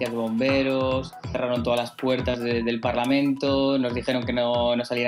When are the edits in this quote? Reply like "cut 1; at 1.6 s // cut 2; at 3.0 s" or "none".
none